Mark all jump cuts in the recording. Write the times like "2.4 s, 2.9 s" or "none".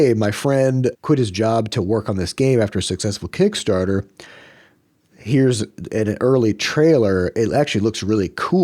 1.0 s